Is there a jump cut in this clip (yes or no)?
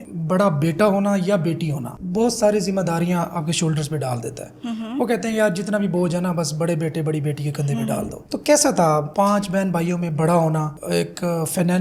no